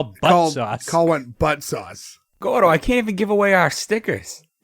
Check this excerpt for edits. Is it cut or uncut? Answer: cut